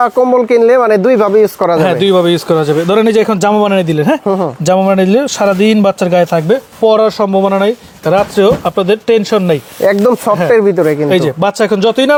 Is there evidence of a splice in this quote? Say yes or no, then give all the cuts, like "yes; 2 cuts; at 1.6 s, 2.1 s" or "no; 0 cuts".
no; 0 cuts